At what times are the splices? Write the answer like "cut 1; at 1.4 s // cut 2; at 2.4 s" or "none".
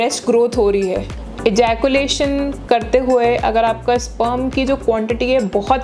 cut 1; at 1.2 s